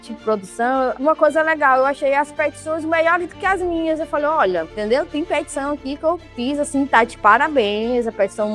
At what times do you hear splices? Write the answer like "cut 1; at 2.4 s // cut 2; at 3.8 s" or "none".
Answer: cut 1; at 1.0 s